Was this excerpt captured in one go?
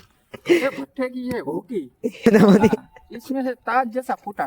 no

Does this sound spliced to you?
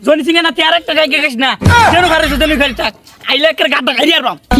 no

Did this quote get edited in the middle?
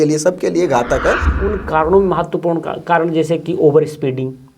yes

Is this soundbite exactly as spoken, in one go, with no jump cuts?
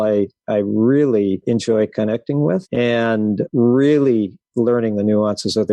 no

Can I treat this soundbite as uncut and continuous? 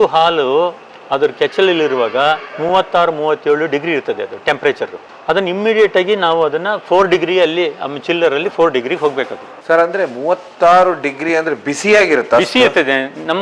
yes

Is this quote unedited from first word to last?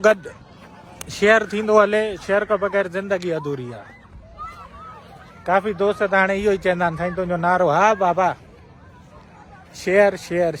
yes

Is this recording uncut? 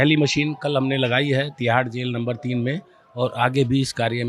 yes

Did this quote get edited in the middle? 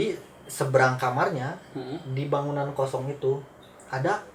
no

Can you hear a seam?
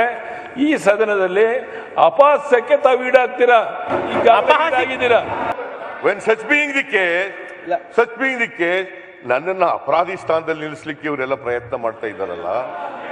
yes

